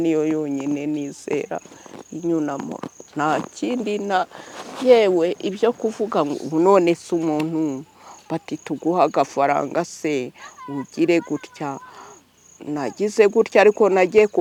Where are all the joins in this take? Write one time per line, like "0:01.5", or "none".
none